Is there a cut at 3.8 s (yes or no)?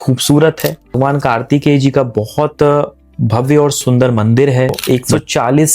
yes